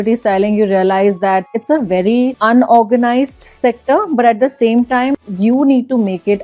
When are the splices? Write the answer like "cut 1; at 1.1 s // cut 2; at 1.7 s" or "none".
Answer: cut 1; at 1.5 s // cut 2; at 2.4 s // cut 3; at 5.1 s